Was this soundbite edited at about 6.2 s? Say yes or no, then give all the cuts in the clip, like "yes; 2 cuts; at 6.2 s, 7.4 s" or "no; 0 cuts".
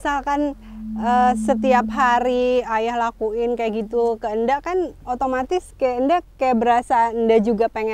no; 0 cuts